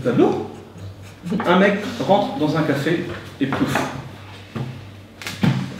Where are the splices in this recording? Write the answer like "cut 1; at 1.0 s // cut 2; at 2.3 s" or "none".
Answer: cut 1; at 1.4 s